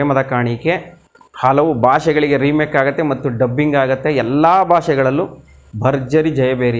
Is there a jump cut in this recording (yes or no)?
no